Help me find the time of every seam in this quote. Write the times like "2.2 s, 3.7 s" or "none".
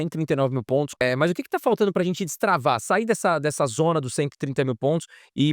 1.0 s